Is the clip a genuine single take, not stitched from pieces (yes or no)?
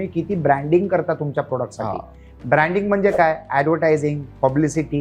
yes